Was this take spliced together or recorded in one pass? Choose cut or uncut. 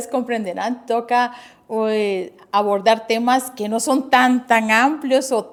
uncut